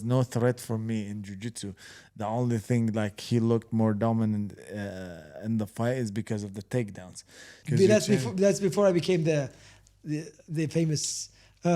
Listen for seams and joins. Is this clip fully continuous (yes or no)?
no